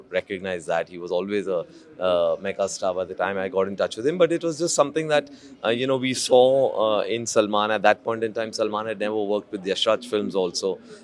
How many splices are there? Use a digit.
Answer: 0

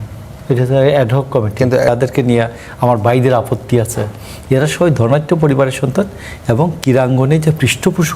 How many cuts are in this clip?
1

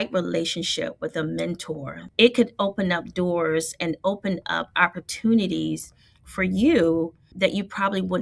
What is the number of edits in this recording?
2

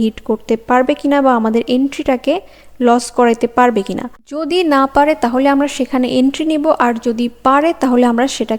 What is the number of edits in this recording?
0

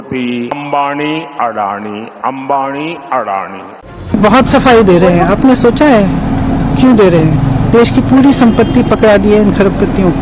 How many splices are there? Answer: 1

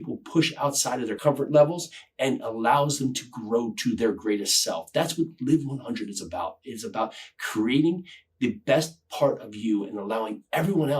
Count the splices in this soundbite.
1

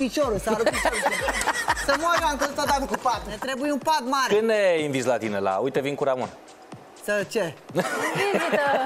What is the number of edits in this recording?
1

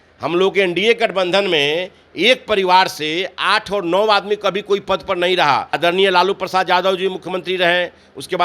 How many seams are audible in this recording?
1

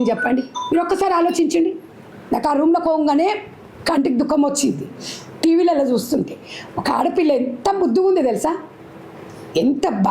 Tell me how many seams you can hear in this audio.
1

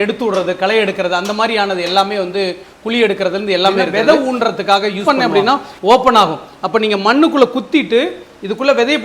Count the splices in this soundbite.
2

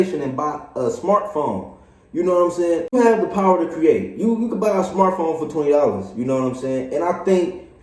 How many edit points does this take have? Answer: 1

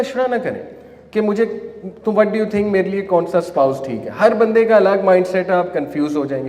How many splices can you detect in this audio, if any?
0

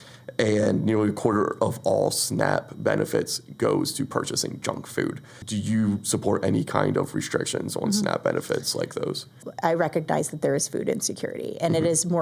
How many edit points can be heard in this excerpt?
2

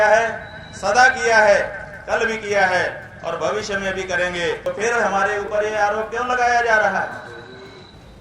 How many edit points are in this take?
1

